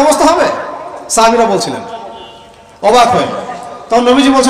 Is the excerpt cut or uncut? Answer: uncut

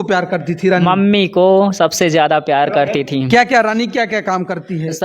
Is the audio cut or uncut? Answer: cut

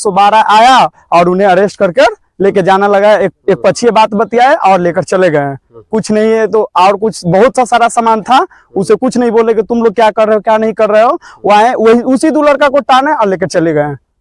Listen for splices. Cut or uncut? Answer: uncut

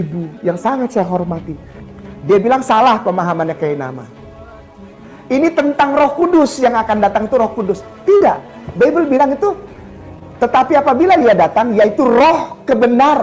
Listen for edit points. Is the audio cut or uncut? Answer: uncut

